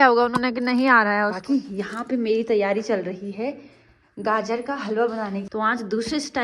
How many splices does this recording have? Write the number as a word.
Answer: two